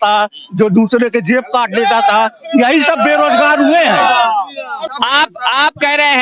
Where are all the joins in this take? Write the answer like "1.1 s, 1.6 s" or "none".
4.8 s